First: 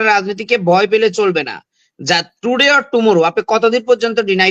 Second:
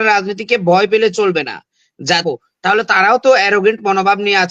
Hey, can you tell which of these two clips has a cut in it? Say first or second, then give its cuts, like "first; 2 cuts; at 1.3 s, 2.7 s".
second; 1 cut; at 2.2 s